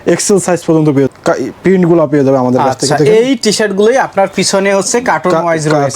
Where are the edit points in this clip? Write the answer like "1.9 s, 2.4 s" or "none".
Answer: 1.1 s